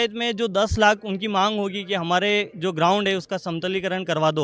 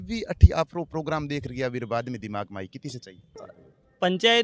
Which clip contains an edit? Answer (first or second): second